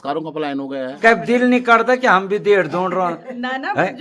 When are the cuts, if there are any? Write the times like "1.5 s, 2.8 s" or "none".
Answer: 0.9 s